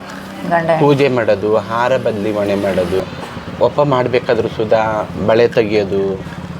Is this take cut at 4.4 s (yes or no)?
no